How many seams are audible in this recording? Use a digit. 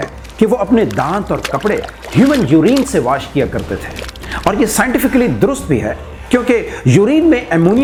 0